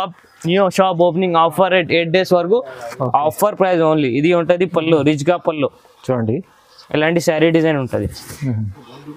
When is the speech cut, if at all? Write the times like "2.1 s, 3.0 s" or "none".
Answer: 2.8 s